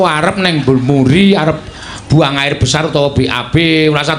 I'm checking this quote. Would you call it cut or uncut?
uncut